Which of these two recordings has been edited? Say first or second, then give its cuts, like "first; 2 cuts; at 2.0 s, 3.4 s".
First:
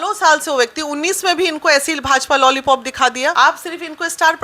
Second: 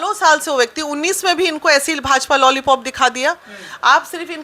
first; 1 cut; at 3.3 s